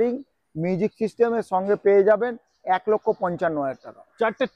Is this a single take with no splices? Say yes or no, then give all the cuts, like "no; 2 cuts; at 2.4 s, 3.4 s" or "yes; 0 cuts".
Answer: yes; 0 cuts